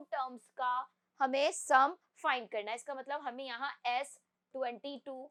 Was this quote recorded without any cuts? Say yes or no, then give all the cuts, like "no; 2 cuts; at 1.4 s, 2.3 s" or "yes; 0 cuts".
yes; 0 cuts